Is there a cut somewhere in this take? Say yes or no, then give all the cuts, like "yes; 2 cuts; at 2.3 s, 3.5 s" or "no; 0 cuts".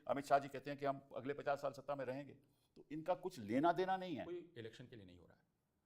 yes; 1 cut; at 4.5 s